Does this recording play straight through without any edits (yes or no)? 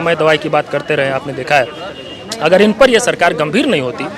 yes